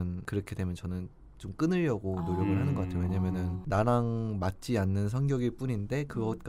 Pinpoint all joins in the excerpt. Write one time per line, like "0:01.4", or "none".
none